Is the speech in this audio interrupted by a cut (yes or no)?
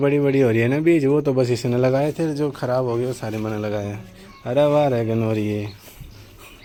no